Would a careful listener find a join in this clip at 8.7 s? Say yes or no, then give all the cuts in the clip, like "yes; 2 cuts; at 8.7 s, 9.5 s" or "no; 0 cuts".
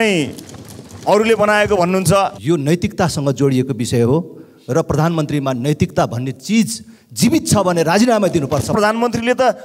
yes; 2 cuts; at 2.4 s, 8.7 s